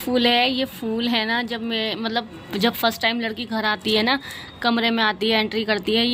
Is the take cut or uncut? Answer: uncut